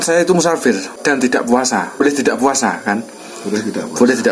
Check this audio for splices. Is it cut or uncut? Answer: cut